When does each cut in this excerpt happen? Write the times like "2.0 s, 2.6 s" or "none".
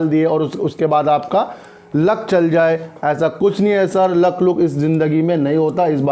none